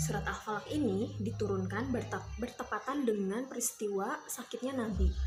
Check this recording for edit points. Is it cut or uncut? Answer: uncut